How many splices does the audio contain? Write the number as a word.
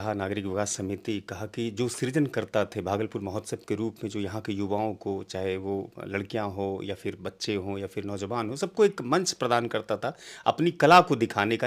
zero